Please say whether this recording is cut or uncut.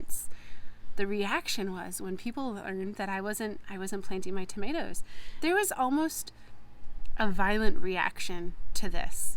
cut